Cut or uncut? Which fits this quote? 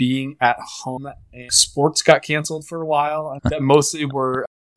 cut